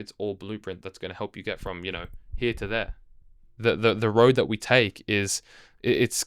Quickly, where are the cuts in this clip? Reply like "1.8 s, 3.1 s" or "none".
none